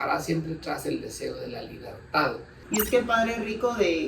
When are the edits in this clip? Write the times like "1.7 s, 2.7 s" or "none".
2.5 s